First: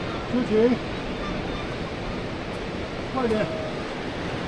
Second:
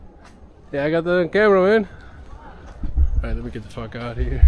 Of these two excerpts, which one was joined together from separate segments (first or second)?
second